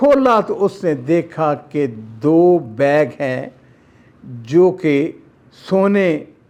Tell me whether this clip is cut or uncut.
uncut